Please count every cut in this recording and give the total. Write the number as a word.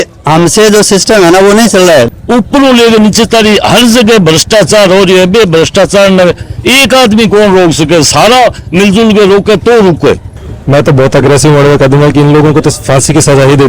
two